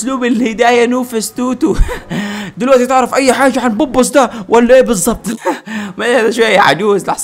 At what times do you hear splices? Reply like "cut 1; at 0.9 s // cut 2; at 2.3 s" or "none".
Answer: cut 1; at 2.5 s